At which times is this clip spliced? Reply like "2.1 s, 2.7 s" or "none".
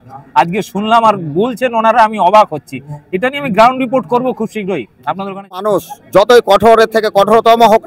5.6 s